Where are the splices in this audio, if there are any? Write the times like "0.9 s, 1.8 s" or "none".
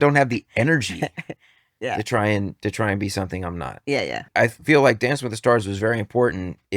4.3 s